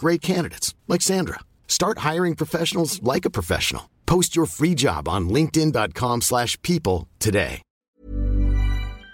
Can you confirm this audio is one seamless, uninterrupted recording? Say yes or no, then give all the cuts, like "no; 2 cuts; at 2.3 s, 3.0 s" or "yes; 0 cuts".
no; 1 cut; at 7.9 s